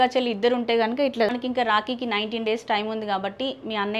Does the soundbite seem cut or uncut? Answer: cut